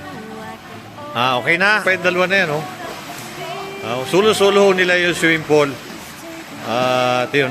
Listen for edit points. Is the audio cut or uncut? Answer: cut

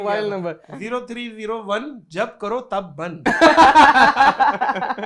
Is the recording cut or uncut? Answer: uncut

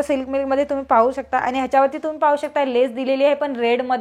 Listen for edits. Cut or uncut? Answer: uncut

